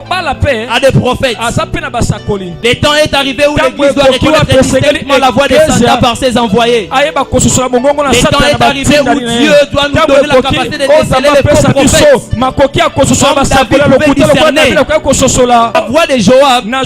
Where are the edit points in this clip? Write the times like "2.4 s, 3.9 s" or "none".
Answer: 2.6 s, 15.8 s